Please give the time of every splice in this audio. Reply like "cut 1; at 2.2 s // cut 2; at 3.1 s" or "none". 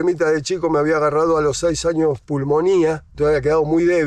none

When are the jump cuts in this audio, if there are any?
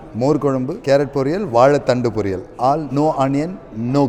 none

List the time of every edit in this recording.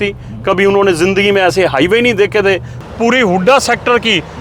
cut 1; at 2.8 s

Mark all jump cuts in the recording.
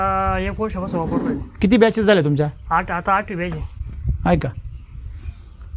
none

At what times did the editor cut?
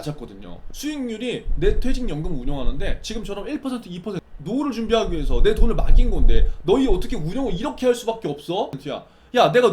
cut 1; at 4.3 s // cut 2; at 8.8 s

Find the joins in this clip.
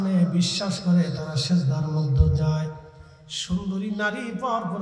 none

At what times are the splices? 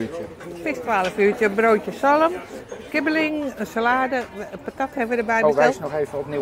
none

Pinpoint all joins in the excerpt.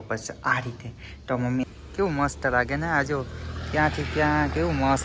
cut 1; at 1.6 s

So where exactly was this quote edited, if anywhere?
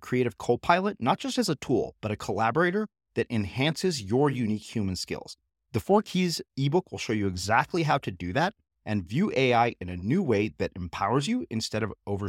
none

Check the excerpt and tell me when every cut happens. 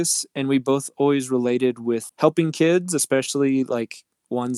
cut 1; at 2.1 s

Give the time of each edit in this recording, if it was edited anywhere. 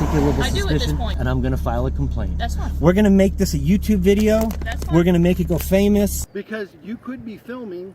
cut 1; at 1.1 s // cut 2; at 6.2 s

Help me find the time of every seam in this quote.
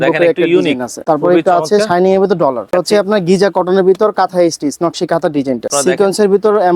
cut 1; at 0.9 s // cut 2; at 2.7 s // cut 3; at 5.7 s

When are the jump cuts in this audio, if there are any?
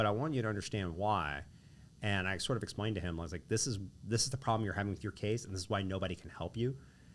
none

